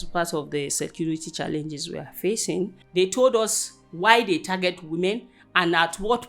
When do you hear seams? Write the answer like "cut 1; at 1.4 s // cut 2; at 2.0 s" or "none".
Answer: cut 1; at 2.8 s